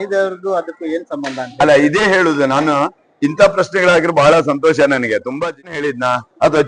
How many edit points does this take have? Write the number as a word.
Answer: one